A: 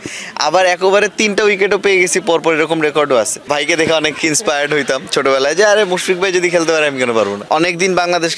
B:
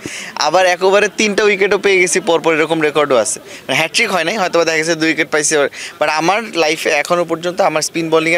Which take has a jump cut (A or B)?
A